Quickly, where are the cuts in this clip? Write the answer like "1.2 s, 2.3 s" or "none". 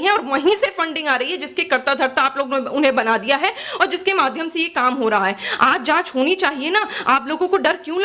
none